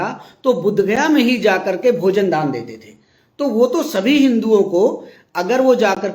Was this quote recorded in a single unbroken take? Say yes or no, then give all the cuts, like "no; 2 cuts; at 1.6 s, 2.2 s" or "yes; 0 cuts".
yes; 0 cuts